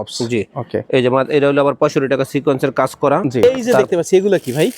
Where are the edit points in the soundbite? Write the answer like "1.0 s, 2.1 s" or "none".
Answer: 3.4 s